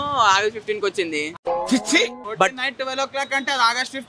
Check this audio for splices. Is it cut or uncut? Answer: cut